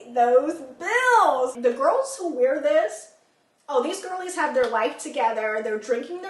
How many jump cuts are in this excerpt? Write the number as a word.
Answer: one